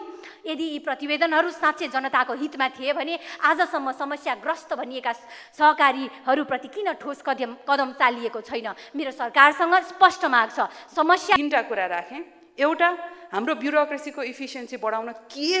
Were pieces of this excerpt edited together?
yes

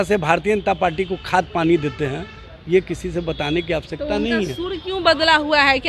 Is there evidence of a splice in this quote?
no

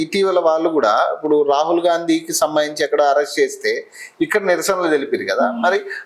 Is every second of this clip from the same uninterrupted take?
yes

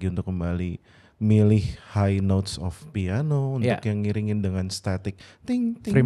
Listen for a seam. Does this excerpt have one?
no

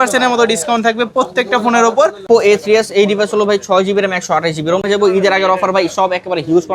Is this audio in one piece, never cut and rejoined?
no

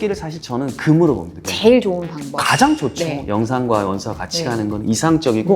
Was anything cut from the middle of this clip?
yes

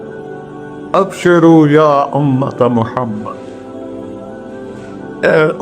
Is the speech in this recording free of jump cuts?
no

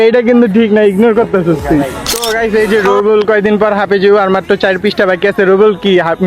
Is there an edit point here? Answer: yes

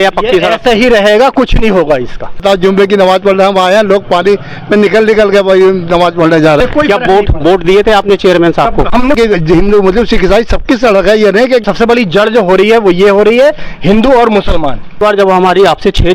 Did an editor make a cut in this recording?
yes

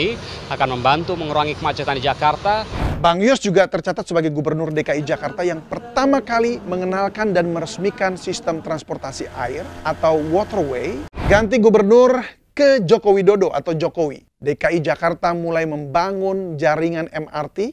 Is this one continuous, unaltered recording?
no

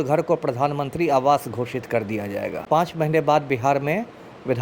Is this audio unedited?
no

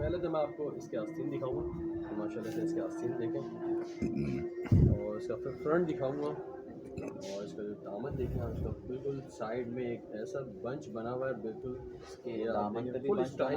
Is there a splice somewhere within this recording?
no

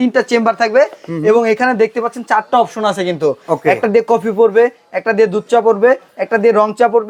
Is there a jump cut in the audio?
no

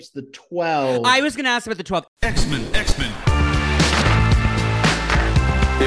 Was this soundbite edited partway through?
yes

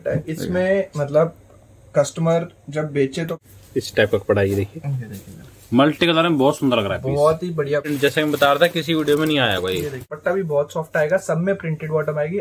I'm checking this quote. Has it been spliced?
yes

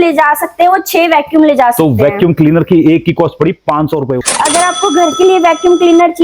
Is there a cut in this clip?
yes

